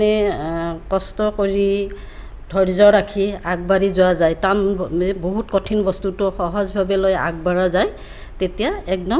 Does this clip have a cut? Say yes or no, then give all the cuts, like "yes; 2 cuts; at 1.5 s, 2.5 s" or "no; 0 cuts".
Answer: no; 0 cuts